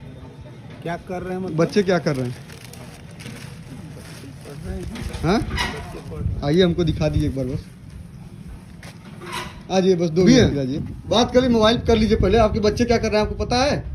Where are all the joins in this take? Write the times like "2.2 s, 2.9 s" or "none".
none